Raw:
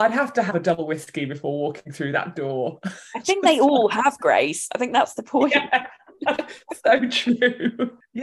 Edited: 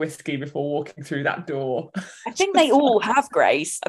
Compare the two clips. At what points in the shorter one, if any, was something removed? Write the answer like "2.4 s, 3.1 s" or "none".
none

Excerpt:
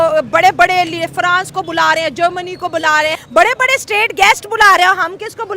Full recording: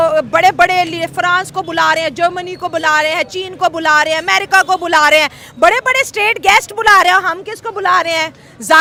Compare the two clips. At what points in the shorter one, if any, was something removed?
3.2 s

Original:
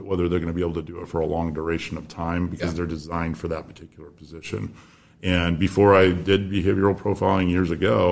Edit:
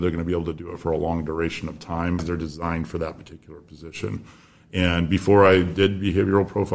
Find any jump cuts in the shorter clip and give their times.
2.2 s

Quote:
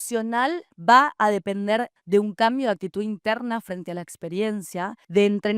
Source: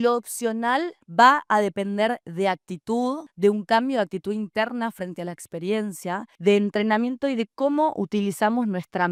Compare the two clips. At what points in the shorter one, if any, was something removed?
2.0 s

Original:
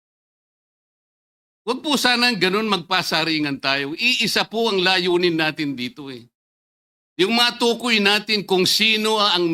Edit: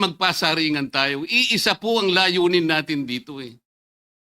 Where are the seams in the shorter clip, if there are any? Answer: none

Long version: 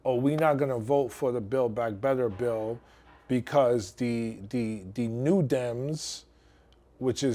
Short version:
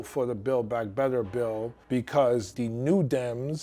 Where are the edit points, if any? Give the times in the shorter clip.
1.8 s, 2.5 s

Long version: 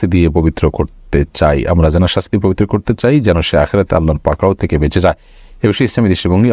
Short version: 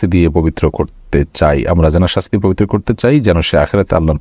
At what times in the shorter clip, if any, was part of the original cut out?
none

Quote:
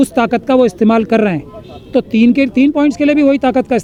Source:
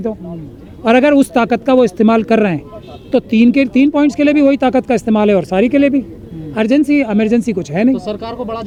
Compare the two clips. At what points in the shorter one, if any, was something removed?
none

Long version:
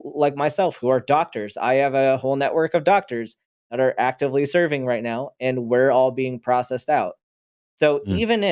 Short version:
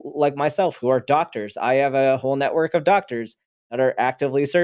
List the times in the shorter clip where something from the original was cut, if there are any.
none

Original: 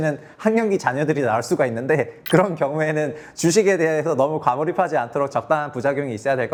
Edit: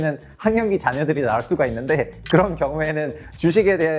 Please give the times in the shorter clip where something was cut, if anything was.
none

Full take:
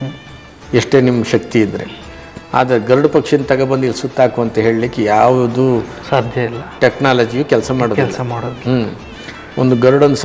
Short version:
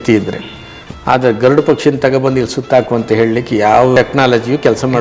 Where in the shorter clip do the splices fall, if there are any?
3.9 s

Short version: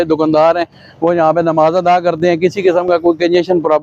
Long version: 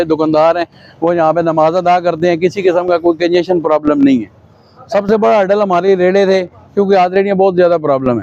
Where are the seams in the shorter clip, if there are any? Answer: none

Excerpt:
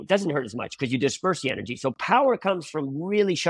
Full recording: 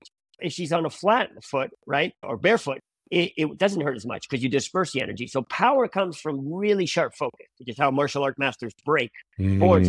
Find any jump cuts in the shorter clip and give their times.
none

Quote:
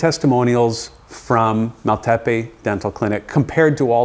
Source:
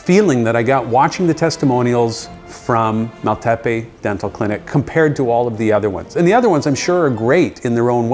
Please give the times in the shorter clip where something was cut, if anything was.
none

